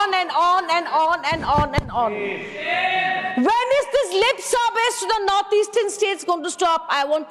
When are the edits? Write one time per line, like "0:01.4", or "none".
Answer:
none